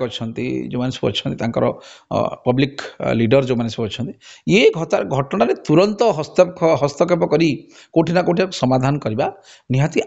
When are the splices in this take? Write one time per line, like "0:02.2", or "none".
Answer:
none